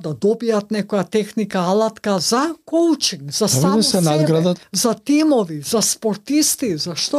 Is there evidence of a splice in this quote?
yes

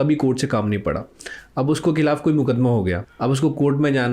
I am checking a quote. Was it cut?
yes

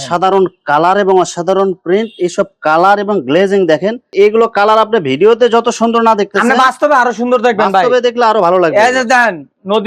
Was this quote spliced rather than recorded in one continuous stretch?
no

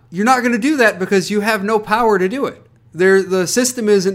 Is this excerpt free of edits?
yes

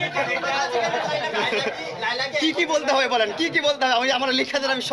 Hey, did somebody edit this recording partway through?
no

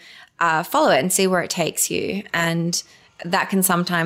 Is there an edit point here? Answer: no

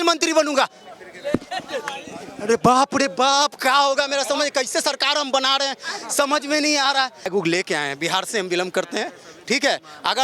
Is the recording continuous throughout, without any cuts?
no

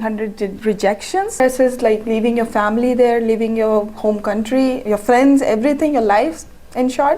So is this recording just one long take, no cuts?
no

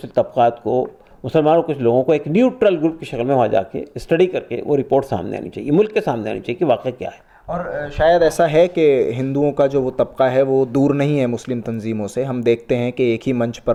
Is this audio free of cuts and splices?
yes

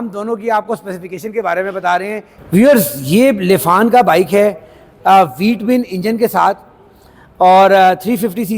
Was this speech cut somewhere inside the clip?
yes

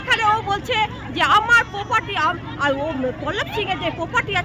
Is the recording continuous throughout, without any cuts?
yes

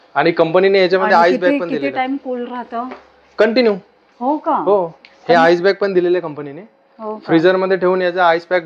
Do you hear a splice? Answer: no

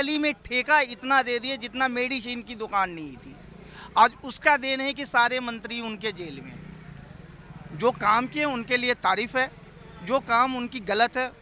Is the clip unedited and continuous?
yes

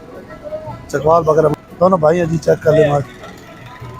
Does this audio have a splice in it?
yes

